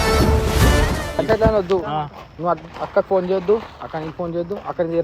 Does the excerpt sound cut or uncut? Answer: cut